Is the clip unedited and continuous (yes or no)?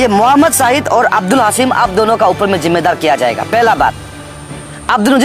yes